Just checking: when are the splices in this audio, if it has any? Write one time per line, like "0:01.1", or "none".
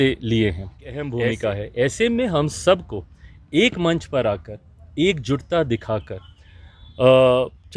0:01.1